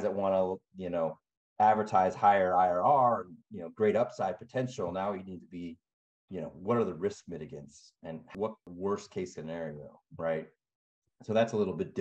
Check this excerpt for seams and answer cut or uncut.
cut